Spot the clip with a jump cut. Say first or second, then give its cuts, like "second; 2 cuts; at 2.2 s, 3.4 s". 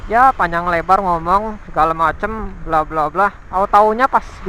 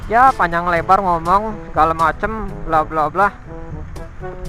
first; 1 cut; at 3.4 s